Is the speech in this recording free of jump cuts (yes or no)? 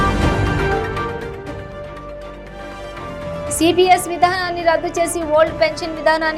yes